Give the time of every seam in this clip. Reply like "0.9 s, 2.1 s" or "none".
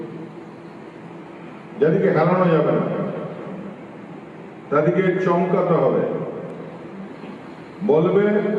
none